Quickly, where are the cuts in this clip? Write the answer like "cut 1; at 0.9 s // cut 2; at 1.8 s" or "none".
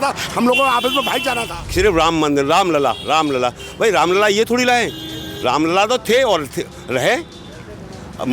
cut 1; at 1.6 s